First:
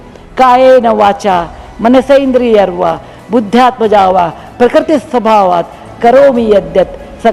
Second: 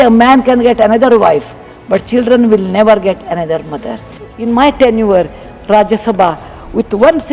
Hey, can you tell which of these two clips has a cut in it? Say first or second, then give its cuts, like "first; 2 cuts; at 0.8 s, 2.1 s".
second; 1 cut; at 4.3 s